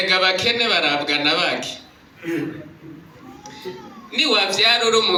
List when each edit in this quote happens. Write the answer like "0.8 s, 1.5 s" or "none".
none